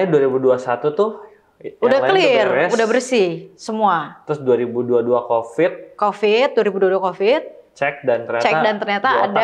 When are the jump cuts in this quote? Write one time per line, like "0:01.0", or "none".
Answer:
none